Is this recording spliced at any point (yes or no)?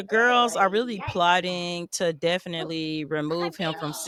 no